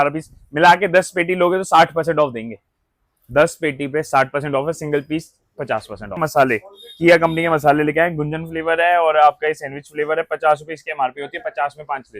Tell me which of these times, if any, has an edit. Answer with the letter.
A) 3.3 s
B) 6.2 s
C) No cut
B